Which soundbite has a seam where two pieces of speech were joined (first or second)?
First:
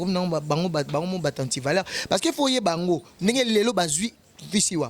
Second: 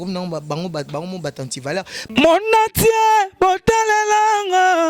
second